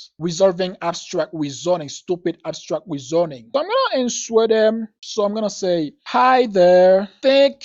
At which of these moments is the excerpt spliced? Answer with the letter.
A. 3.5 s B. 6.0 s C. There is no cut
A